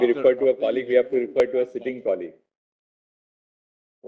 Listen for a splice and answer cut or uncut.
uncut